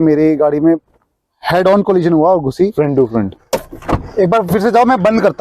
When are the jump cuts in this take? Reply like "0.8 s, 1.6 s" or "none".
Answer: 3.4 s